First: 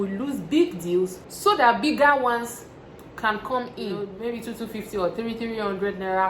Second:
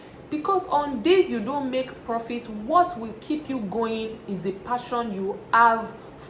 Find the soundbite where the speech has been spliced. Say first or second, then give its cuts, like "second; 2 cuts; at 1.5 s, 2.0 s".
first; 2 cuts; at 1.2 s, 4.2 s